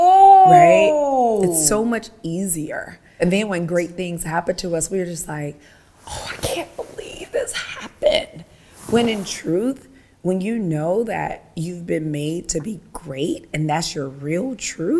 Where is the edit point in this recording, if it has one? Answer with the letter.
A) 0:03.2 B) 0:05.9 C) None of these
A